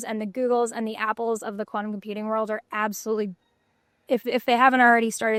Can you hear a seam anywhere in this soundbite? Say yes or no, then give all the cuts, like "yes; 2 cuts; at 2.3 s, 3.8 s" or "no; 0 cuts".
no; 0 cuts